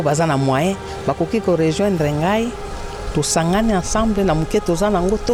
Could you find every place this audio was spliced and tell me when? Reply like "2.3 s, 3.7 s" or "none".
none